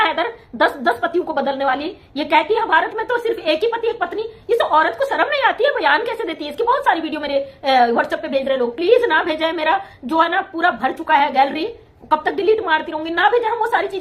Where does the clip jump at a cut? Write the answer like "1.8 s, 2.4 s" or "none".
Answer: none